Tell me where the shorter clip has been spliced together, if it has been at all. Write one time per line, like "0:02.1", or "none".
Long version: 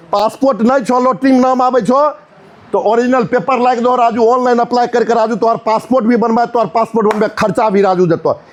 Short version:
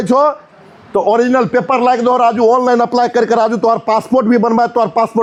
none